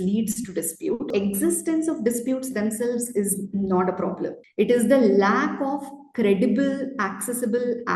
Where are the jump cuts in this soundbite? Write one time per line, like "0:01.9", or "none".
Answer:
0:01.1

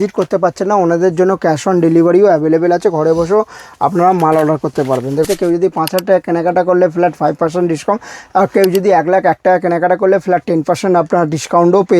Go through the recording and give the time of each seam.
0:05.2

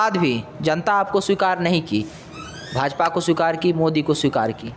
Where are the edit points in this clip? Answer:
none

